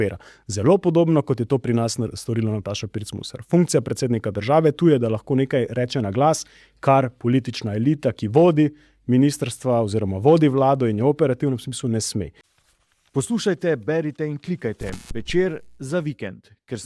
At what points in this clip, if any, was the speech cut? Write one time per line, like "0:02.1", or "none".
0:12.4